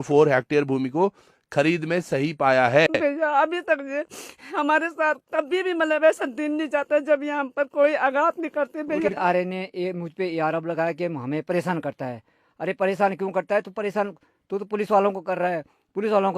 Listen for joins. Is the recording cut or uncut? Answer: cut